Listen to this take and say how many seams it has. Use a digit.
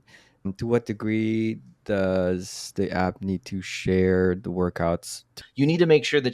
1